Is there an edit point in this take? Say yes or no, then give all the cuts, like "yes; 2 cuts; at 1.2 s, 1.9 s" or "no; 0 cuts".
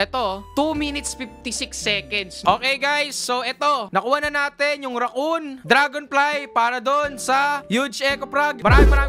yes; 1 cut; at 2.4 s